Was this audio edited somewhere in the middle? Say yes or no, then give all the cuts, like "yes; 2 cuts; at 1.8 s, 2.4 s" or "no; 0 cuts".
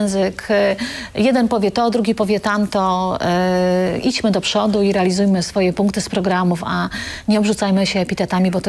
no; 0 cuts